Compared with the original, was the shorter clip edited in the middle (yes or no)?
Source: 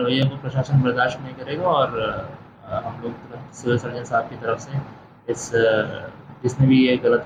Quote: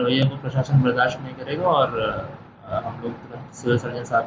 no